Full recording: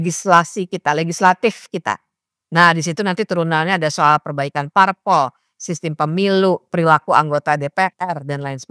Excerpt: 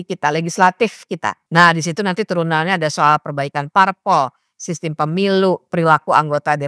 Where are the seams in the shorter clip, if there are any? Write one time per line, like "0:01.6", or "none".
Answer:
0:01.3